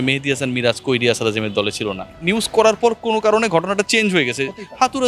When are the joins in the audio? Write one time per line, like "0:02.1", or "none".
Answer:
0:02.1